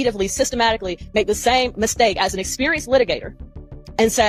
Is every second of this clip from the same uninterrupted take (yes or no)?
yes